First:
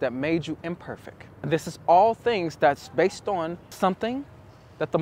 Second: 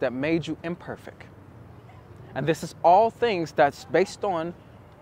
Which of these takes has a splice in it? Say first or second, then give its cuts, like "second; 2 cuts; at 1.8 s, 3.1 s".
first; 2 cuts; at 1.3 s, 3.7 s